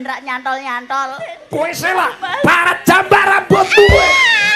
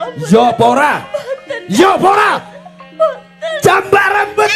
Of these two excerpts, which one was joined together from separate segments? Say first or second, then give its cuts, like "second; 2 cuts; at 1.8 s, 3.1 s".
first; 1 cut; at 1.4 s